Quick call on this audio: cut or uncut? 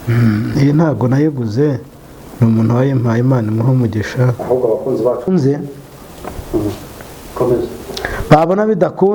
cut